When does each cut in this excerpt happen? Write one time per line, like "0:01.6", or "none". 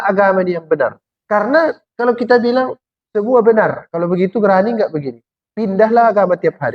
0:01.1